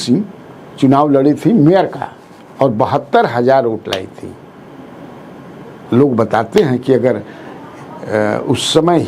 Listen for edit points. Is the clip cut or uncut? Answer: uncut